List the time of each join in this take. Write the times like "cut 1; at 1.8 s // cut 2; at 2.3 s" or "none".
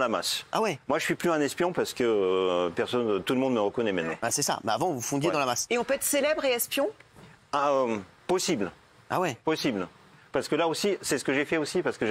none